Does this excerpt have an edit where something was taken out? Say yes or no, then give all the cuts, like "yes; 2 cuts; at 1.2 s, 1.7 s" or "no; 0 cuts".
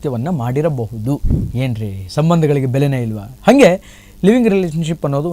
yes; 1 cut; at 1.4 s